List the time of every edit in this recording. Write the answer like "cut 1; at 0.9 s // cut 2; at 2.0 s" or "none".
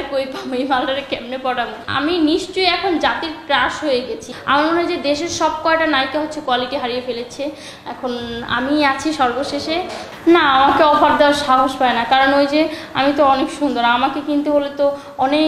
cut 1; at 1.8 s // cut 2; at 4.3 s // cut 3; at 10.0 s